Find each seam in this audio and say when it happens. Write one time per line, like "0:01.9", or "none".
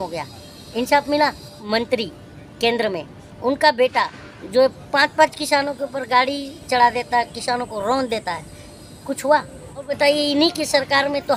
0:01.6
0:09.9